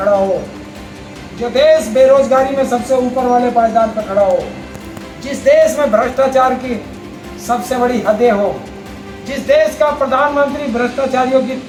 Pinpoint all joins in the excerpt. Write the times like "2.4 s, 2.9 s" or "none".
none